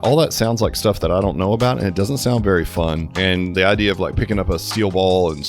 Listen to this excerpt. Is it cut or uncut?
cut